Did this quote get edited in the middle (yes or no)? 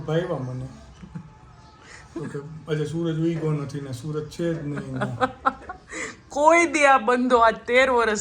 no